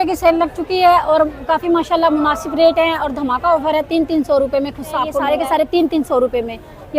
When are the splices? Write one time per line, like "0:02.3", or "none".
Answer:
0:05.3